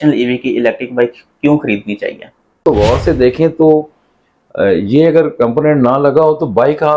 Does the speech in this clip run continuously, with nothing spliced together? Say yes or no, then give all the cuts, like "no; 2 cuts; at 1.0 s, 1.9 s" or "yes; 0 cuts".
no; 1 cut; at 2.6 s